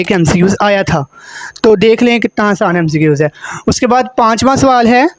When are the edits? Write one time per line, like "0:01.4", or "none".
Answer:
none